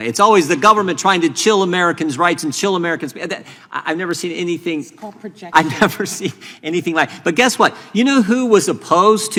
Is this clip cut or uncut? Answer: uncut